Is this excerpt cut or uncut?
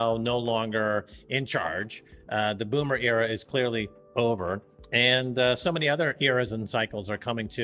uncut